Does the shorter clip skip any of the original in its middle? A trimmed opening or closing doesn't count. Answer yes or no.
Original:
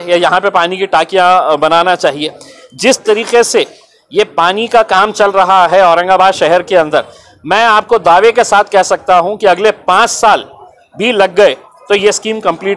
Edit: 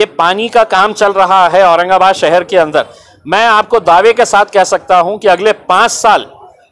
no